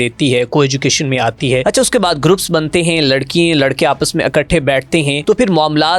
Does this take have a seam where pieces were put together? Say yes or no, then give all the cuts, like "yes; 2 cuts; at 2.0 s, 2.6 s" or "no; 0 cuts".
yes; 2 cuts; at 1.6 s, 5.2 s